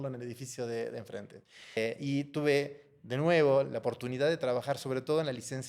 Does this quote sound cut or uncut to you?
cut